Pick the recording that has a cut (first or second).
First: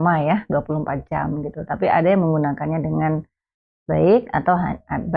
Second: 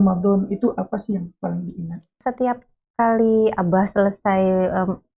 second